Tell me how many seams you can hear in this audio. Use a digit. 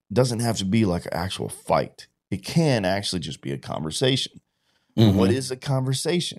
0